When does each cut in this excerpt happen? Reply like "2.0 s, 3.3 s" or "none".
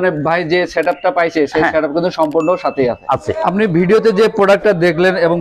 3.3 s